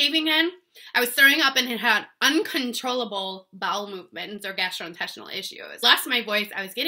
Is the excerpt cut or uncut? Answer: cut